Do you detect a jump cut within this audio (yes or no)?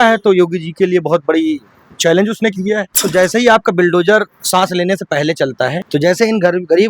yes